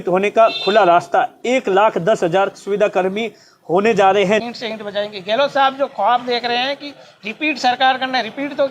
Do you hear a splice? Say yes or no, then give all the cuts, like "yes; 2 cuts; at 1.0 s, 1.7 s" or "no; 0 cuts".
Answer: yes; 1 cut; at 4.4 s